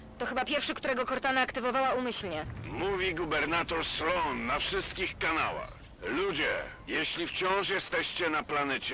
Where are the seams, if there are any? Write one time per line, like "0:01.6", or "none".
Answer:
0:02.6